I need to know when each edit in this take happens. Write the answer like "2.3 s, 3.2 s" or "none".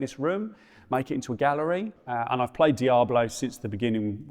1.9 s